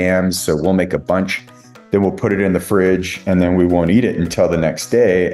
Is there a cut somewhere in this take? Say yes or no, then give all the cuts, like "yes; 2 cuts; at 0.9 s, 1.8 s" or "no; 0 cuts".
no; 0 cuts